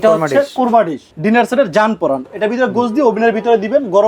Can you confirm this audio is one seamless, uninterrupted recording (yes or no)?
no